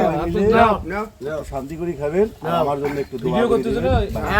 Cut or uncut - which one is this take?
uncut